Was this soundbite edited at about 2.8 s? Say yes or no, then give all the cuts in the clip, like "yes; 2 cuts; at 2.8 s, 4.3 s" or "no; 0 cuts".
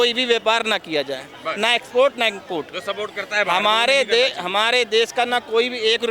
no; 0 cuts